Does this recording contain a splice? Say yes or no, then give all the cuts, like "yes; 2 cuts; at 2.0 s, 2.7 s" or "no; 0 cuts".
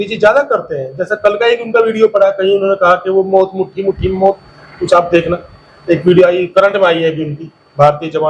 no; 0 cuts